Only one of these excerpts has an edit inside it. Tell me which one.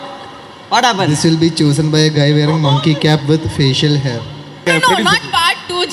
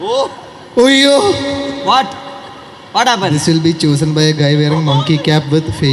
first; 1 cut; at 4.7 s

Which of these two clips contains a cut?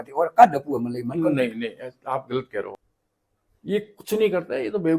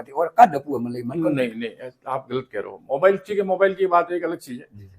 first; 1 cut; at 2.8 s

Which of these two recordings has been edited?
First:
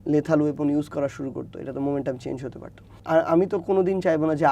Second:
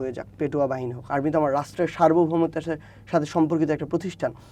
first; 1 cut; at 3.0 s

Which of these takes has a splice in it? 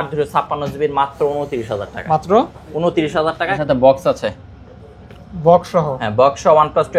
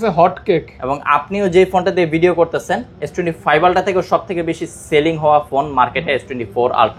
first; 1 cut; at 3.6 s

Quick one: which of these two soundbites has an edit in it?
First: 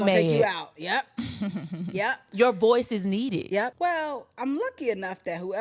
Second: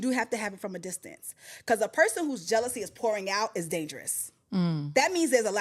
first; 1 cut; at 3.7 s

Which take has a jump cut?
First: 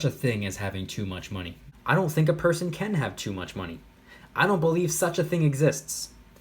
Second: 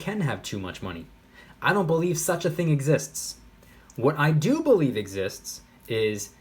first; 1 cut; at 1.6 s

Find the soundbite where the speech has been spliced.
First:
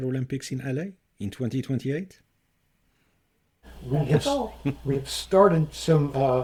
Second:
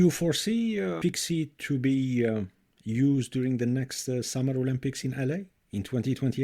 second; 1 cut; at 1.0 s

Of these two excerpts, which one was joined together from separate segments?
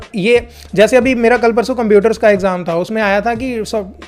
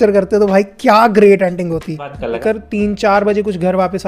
second; 1 cut; at 2.3 s

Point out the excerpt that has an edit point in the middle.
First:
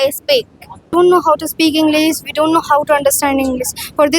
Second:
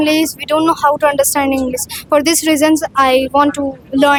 first; 1 cut; at 0.9 s

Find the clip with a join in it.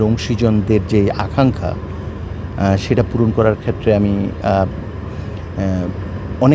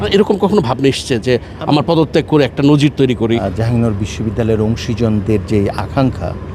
second; 1 cut; at 3.4 s

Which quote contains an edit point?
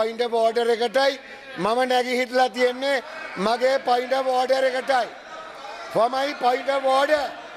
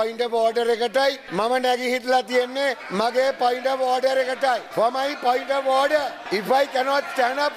second; 4 cuts; at 1.2 s, 2.8 s, 4.6 s, 6.2 s

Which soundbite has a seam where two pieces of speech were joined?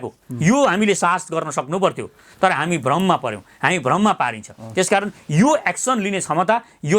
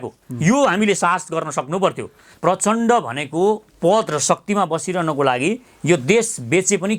second; 1 cut; at 2.3 s

